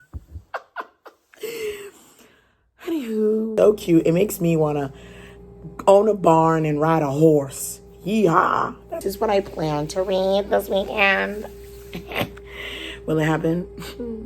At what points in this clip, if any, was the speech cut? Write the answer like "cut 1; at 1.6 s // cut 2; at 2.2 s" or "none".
cut 1; at 3.5 s // cut 2; at 9.0 s